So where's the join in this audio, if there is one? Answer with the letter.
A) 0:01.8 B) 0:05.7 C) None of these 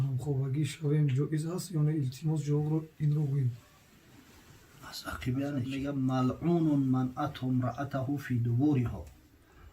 B